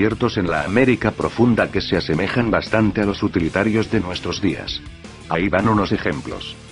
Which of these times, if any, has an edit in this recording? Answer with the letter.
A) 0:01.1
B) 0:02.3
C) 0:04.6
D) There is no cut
A